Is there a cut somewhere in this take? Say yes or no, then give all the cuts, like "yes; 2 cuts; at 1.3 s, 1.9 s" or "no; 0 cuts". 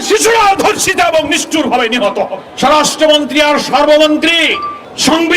yes; 1 cut; at 2.4 s